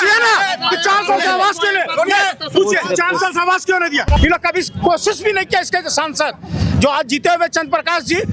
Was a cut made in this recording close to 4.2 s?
yes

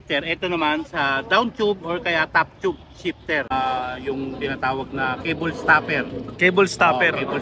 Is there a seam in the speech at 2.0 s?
no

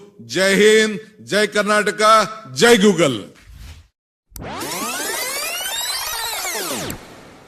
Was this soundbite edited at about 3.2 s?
yes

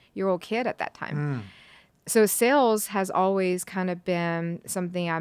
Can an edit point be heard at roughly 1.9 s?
yes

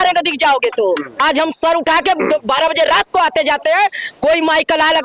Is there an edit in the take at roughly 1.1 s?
yes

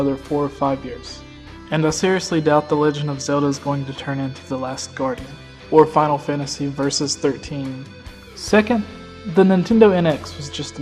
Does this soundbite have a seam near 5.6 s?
yes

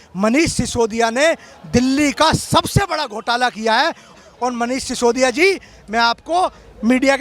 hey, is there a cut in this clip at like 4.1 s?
yes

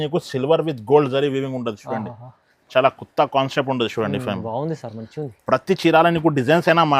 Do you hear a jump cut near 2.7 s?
no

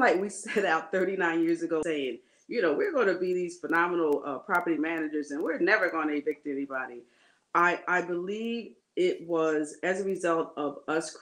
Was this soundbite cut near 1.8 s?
yes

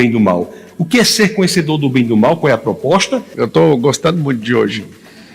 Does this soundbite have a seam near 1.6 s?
no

